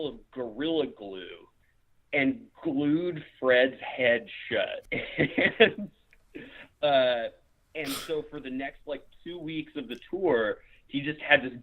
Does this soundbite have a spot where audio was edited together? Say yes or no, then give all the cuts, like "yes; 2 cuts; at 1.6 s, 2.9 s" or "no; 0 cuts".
yes; 1 cut; at 4.8 s